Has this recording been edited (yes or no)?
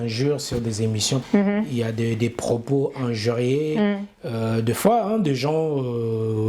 yes